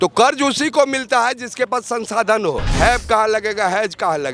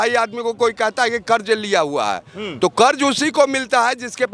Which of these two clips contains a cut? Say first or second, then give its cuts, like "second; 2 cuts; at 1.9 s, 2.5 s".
first; 1 cut; at 2.7 s